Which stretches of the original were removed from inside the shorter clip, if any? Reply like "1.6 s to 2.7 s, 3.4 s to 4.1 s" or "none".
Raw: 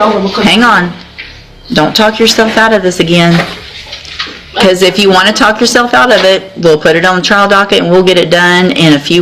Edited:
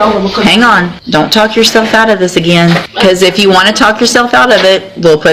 1.0 s to 1.6 s, 3.5 s to 4.5 s